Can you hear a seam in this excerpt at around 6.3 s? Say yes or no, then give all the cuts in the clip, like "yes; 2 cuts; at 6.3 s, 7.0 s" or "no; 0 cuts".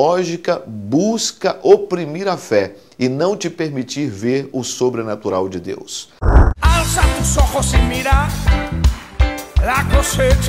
yes; 1 cut; at 6.3 s